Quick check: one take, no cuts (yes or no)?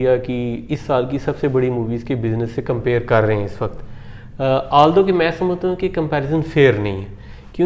yes